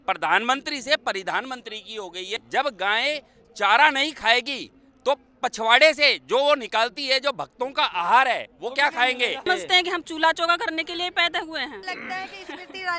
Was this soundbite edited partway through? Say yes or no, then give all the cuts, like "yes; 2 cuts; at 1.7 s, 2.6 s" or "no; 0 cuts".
yes; 3 cuts; at 2.3 s, 9.5 s, 11.8 s